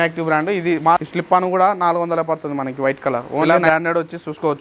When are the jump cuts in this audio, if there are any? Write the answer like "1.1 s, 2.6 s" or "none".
1.0 s, 3.5 s